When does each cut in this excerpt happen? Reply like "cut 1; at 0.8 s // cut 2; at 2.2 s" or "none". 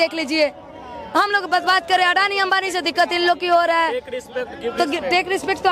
none